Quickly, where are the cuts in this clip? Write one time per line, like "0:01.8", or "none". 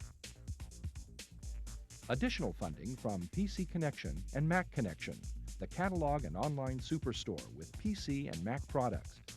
0:02.0